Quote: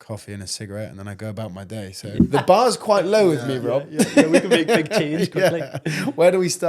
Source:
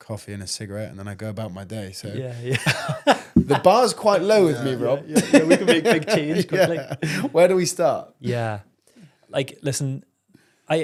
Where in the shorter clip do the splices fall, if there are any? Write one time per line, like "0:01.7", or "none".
0:02.1